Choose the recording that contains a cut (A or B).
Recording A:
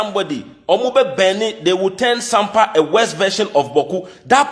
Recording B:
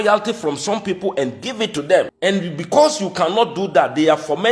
B